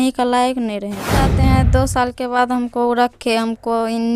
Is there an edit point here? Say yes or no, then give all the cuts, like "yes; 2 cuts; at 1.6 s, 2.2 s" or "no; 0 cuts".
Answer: yes; 1 cut; at 1.3 s